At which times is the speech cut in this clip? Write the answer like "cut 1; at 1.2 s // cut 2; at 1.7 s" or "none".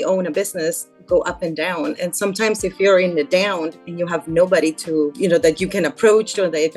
none